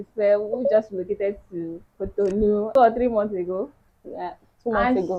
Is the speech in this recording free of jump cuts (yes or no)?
no